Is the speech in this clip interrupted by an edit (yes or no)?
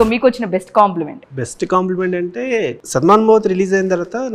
yes